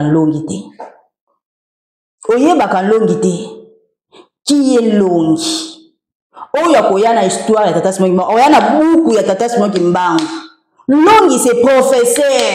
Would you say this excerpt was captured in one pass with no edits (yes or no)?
yes